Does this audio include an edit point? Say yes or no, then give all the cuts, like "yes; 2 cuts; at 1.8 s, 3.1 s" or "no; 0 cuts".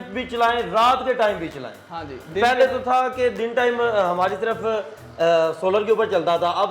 no; 0 cuts